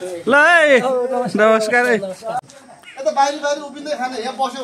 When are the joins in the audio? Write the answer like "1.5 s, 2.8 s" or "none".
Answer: none